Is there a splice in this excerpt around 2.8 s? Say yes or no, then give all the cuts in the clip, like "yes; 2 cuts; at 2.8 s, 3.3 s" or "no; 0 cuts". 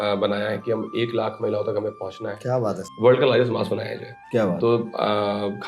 yes; 1 cut; at 2.8 s